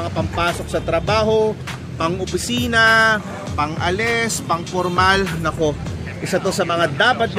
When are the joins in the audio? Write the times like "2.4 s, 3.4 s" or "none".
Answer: none